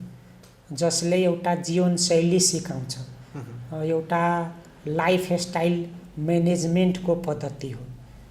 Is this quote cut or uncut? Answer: uncut